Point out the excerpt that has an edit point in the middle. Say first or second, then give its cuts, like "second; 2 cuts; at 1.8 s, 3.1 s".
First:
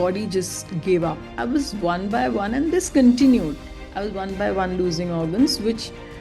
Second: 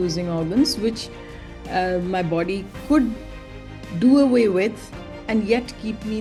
first; 1 cut; at 1.3 s